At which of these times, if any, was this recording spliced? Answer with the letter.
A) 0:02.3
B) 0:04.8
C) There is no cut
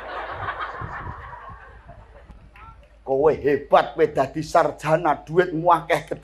A